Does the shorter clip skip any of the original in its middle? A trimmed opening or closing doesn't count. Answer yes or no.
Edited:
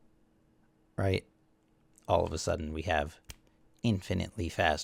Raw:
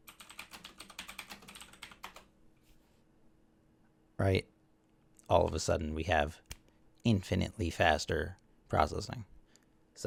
no